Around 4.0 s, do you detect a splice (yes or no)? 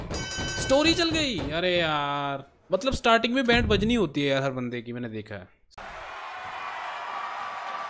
no